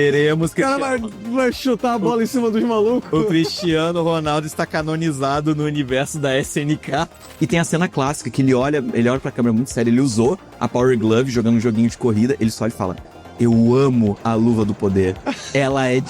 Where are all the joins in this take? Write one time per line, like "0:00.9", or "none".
0:07.2